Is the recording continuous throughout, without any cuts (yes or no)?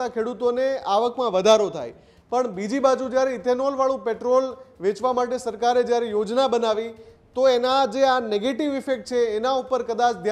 yes